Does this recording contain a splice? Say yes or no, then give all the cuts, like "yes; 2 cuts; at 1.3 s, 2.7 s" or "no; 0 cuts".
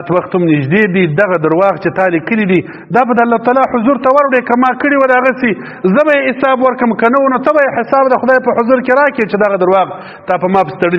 no; 0 cuts